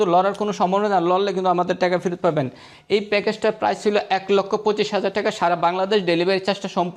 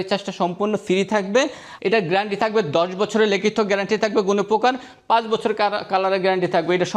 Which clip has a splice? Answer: second; 1 cut; at 1.6 s

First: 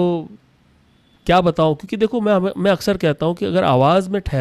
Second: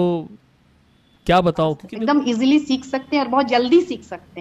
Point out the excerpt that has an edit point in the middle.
second; 1 cut; at 1.9 s

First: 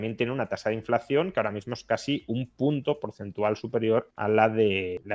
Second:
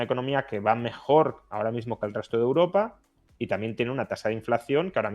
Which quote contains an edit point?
first; 1 cut; at 4.1 s

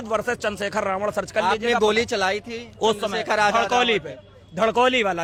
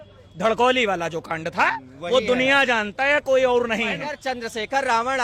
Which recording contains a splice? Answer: second; 1 cut; at 4.1 s

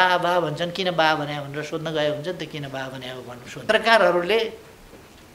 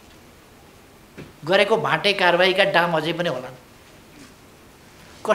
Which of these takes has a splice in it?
first; 1 cut; at 3.7 s

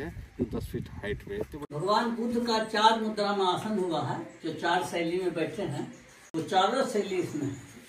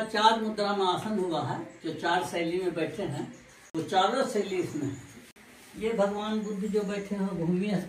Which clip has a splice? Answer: first; 1 cut; at 1.5 s

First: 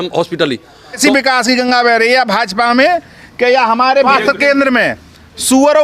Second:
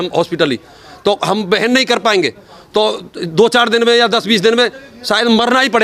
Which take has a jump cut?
first; 2 cuts; at 1.0 s, 4.1 s

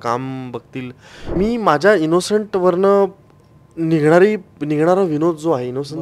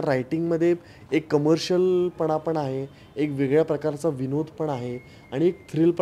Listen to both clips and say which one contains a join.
first; 1 cut; at 1.3 s

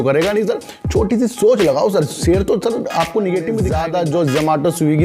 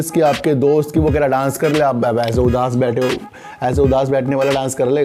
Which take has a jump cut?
first; 1 cut; at 3.7 s

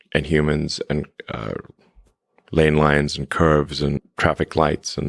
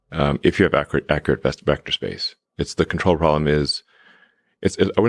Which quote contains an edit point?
first; 1 cut; at 4.1 s

